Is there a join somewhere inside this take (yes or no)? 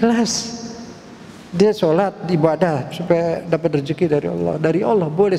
no